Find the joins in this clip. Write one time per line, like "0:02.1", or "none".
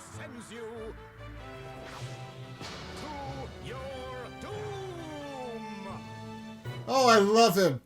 0:06.8